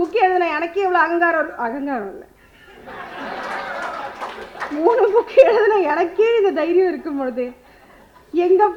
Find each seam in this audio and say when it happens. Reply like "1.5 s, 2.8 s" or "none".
none